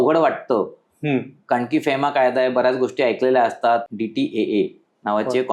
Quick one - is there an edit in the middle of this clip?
yes; 1 cut; at 3.9 s

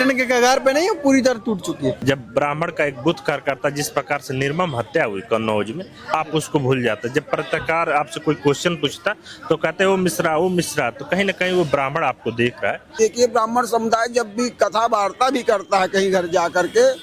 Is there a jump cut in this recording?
yes; 2 cuts; at 2.0 s, 12.9 s

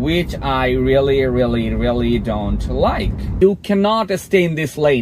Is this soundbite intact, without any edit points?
no; 1 cut; at 3.4 s

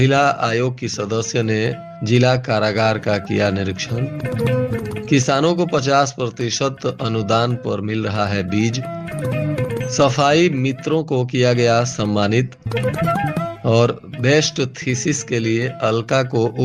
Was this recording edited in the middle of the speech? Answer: no; 0 cuts

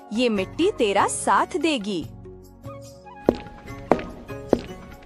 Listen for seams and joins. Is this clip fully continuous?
yes; 0 cuts

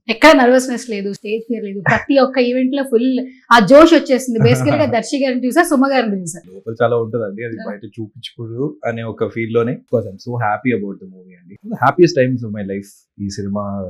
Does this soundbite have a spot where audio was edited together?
yes; 3 cuts; at 6.6 s, 9.8 s, 11.5 s

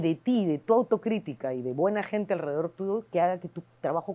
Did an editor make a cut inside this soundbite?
no; 0 cuts

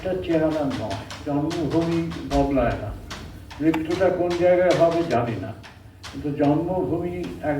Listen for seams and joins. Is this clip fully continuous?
no; 1 cut; at 1.2 s

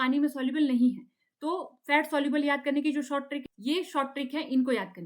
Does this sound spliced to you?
yes; 1 cut; at 3.4 s

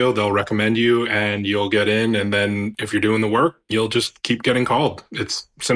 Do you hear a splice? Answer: yes; 2 cuts; at 2.8 s, 3.6 s

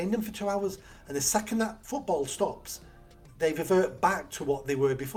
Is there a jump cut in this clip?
yes; 1 cut; at 1.8 s

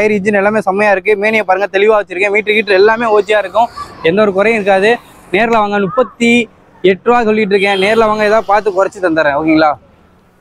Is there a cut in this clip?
no; 0 cuts

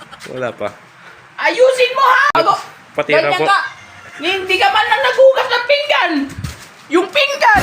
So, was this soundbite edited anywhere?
yes; 1 cut; at 2.3 s

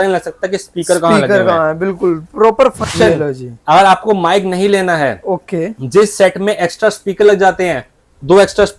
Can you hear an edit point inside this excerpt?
yes; 1 cut; at 2.9 s

